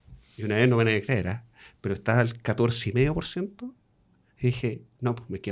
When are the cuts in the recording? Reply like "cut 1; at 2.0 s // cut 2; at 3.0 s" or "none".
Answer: none